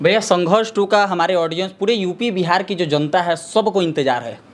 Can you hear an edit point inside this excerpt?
no; 0 cuts

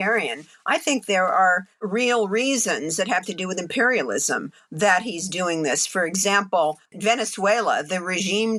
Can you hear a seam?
no; 0 cuts

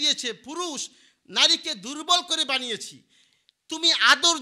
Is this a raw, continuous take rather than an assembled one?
yes; 0 cuts

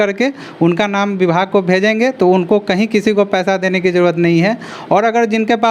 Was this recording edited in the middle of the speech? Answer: no; 0 cuts

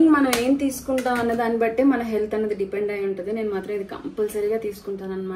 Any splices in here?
no; 0 cuts

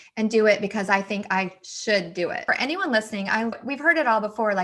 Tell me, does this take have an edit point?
yes; 2 cuts; at 2.4 s, 3.6 s

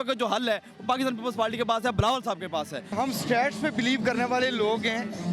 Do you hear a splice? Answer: yes; 1 cut; at 2.9 s

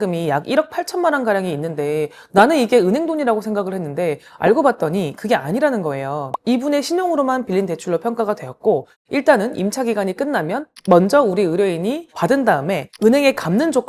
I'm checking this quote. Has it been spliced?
no; 0 cuts

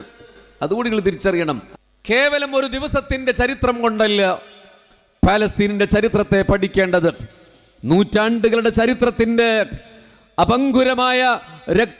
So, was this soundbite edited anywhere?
yes; 1 cut; at 1.7 s

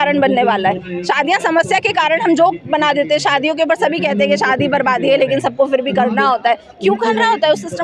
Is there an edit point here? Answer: no; 0 cuts

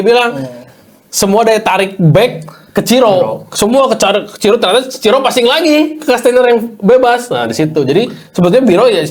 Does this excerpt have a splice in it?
no; 0 cuts

